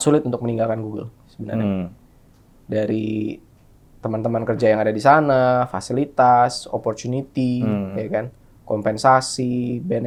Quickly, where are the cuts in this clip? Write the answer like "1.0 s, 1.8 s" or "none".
none